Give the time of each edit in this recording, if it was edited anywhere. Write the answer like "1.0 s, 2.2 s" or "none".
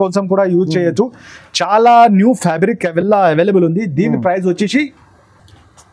none